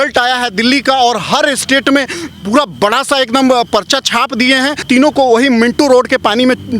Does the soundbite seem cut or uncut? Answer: cut